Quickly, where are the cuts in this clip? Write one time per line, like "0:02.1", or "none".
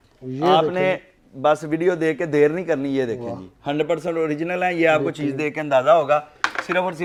none

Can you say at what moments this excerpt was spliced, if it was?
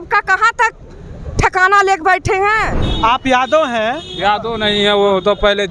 0:02.8

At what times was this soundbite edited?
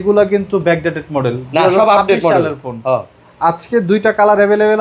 none

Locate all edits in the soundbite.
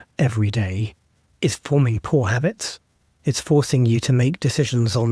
0:01.2

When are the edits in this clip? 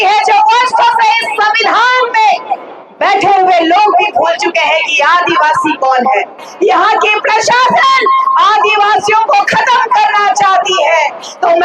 0:06.5

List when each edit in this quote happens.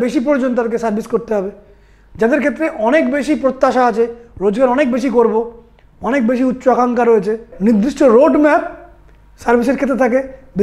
0:07.5

